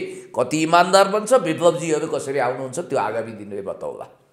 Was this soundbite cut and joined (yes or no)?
no